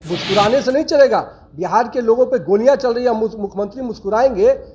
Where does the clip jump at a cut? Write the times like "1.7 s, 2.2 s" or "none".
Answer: none